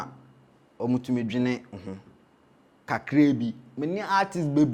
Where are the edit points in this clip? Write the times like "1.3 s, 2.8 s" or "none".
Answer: none

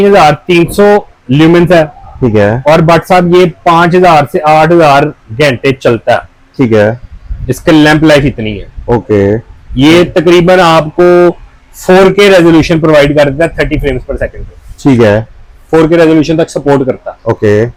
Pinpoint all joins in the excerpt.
none

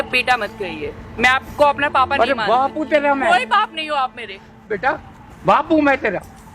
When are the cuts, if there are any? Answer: 4.6 s

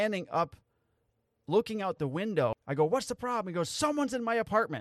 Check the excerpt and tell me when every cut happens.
2.5 s

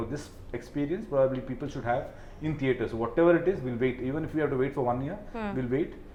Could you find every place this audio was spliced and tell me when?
none

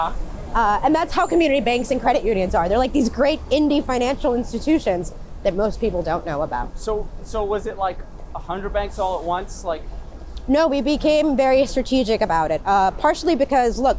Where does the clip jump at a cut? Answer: none

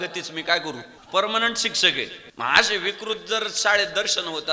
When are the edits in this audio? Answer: 0.9 s, 2.2 s

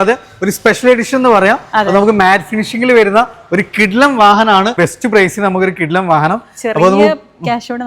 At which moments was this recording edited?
4.8 s

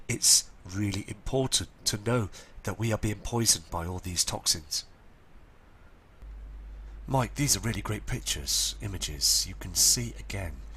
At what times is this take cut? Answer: none

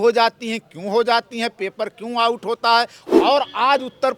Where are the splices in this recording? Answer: 3.2 s

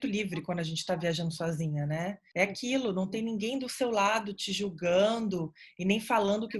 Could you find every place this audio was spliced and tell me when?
none

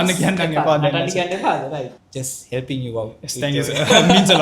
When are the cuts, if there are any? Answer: 2.0 s

